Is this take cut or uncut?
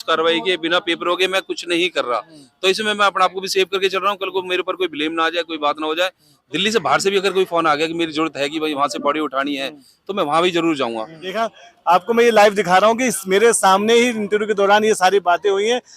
cut